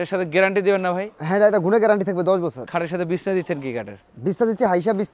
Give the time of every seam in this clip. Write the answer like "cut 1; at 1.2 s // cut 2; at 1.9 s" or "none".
none

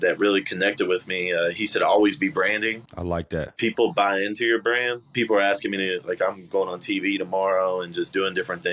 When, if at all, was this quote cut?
cut 1; at 3.2 s // cut 2; at 5.1 s

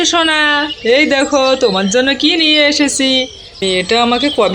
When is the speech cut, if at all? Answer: cut 1; at 3.6 s

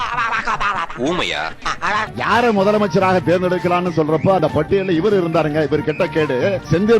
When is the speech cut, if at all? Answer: cut 1; at 2.1 s

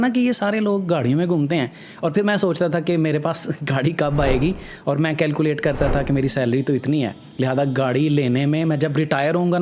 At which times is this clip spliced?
none

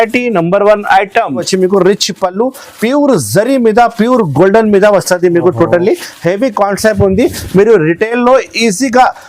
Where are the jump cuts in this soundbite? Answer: cut 1; at 1.5 s

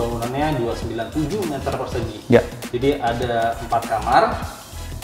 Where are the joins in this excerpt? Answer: none

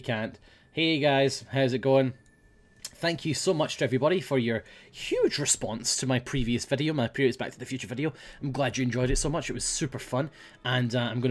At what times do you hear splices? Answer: none

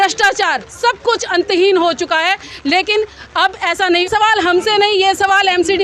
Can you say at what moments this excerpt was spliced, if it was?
cut 1; at 4.1 s

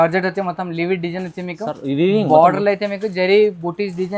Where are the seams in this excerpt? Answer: none

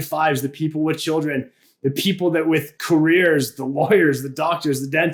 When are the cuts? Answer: cut 1; at 2.7 s

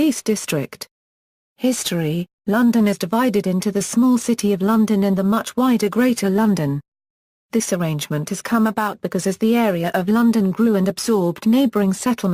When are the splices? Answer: cut 1; at 1.6 s

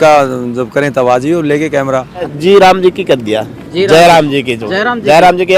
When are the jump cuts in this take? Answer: cut 1; at 2.3 s

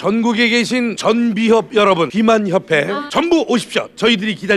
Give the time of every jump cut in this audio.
cut 1; at 1.0 s // cut 2; at 2.1 s // cut 3; at 3.0 s

